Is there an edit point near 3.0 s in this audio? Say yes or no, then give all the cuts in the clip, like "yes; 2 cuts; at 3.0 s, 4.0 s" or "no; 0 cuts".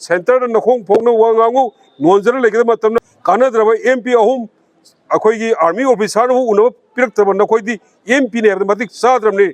yes; 1 cut; at 3.0 s